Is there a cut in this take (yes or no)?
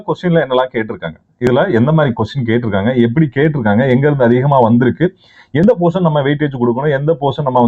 no